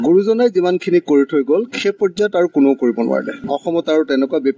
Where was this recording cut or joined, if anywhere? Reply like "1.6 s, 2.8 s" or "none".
3.4 s